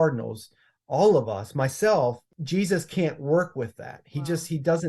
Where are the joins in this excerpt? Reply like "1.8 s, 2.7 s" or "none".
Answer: 2.3 s